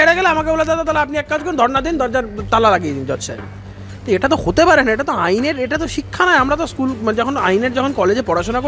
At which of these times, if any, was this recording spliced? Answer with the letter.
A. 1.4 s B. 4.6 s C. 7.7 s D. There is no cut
D